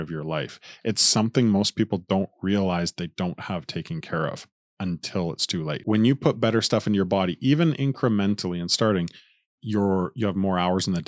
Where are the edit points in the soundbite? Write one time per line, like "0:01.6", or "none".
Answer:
0:05.8